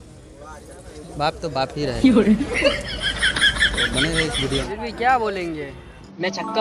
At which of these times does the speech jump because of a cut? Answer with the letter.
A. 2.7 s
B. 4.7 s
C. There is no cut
B